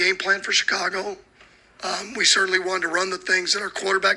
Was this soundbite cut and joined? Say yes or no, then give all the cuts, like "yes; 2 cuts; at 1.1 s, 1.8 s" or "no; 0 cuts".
yes; 1 cut; at 2.5 s